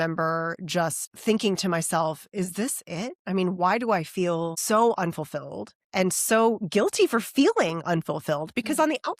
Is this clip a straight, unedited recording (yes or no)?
no